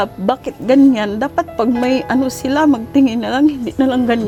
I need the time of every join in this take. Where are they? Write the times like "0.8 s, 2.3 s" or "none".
none